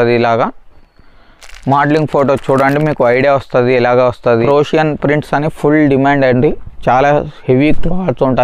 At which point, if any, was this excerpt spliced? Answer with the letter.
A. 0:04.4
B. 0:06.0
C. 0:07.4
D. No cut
A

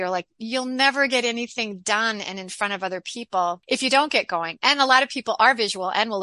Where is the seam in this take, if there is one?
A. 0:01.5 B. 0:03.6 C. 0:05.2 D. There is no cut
B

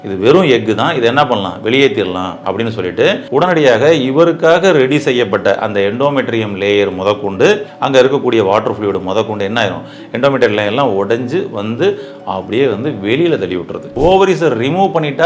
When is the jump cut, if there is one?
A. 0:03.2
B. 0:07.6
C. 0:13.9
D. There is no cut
C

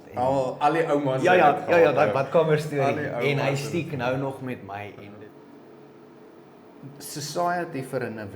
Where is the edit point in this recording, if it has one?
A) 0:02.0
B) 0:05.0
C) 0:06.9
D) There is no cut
B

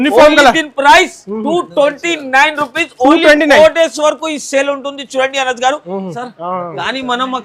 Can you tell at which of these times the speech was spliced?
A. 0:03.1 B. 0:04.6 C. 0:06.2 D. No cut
C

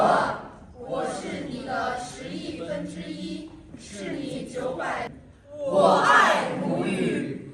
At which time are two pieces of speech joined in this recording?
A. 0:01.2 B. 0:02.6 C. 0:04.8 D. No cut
C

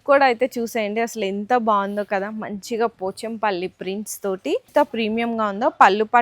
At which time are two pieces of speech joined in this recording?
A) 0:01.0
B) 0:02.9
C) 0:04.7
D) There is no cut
C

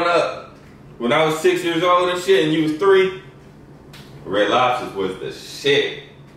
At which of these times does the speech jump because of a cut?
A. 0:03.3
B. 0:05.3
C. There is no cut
C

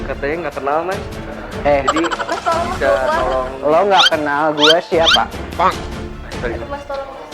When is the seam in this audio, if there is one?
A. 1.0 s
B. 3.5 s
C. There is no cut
C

